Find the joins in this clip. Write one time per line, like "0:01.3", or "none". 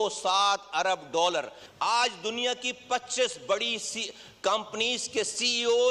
0:01.6